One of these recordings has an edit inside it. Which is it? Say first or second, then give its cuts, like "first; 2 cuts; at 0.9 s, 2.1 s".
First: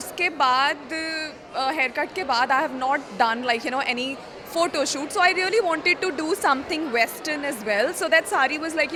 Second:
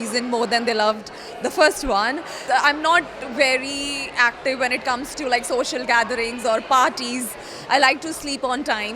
second; 1 cut; at 2.4 s